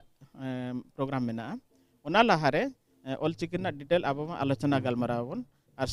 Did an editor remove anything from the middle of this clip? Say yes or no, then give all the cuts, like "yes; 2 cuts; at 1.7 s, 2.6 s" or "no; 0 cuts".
no; 0 cuts